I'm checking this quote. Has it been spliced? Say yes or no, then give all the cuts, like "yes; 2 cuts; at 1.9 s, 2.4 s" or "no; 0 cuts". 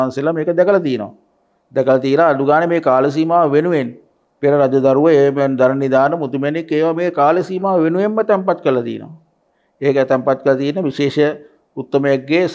no; 0 cuts